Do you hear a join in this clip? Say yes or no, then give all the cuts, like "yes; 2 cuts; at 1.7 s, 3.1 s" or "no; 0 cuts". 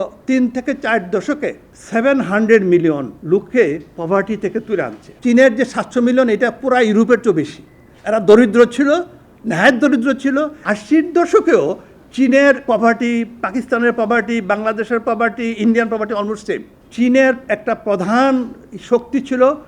yes; 5 cuts; at 1.7 s, 3.1 s, 5.1 s, 10.6 s, 16.8 s